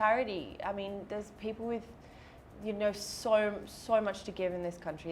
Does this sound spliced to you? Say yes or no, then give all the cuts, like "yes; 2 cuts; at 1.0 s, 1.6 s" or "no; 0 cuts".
no; 0 cuts